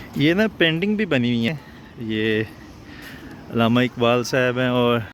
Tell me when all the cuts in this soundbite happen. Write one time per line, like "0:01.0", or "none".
none